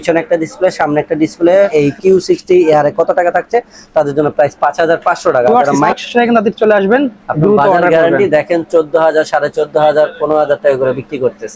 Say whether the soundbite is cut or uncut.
cut